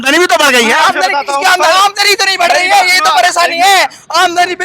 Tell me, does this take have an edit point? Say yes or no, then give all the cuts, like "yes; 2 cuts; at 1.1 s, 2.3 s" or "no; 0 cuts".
no; 0 cuts